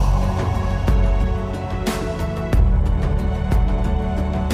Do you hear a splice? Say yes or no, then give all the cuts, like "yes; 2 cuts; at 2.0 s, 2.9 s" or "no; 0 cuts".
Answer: no; 0 cuts